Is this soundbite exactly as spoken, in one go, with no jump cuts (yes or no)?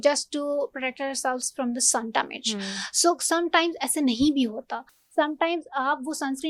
yes